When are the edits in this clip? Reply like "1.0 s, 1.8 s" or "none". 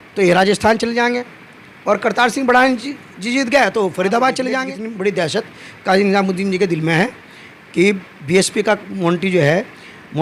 4.8 s